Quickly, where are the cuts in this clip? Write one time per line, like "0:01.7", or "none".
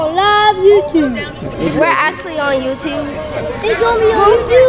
0:01.6
0:03.6